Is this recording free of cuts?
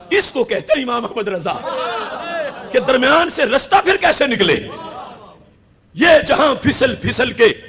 yes; 0 cuts

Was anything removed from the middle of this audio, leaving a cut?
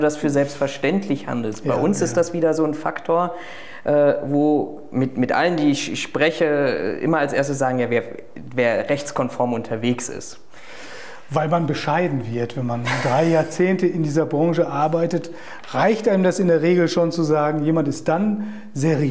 no; 0 cuts

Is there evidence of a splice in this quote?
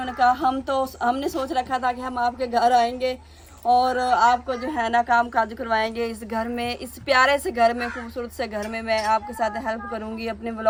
no; 0 cuts

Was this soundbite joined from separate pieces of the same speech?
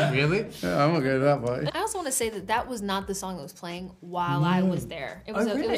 yes; 1 cut; at 1.7 s

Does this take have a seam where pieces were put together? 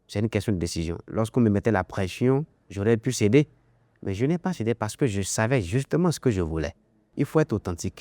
yes; 1 cut; at 7.1 s

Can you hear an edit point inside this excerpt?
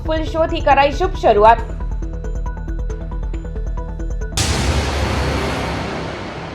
yes; 1 cut; at 4.3 s

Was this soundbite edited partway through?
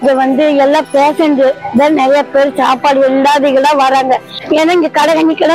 yes; 1 cut; at 4.3 s

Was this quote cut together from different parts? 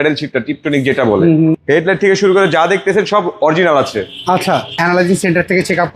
yes; 2 cuts; at 1.6 s, 4.7 s

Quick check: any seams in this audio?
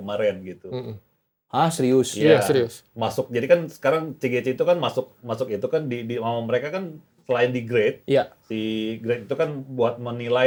no; 0 cuts

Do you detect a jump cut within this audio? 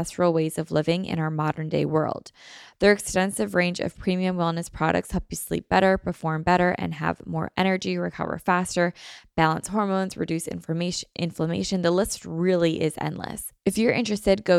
yes; 1 cut; at 13.4 s

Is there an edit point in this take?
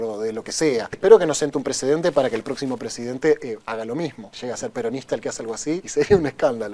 yes; 3 cuts; at 0.9 s, 4.3 s, 5.9 s

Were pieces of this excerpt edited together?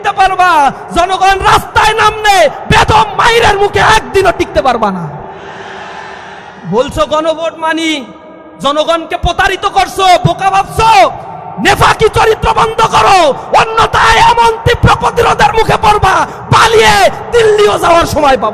no; 0 cuts

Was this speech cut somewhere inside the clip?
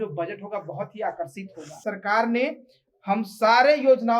yes; 1 cut; at 1.8 s

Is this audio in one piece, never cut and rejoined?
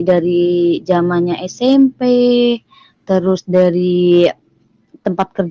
yes; 0 cuts

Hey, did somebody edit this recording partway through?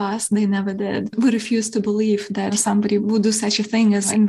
yes; 2 cuts; at 1.1 s, 3.0 s

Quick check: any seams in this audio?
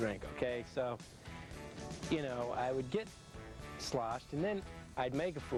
no; 0 cuts

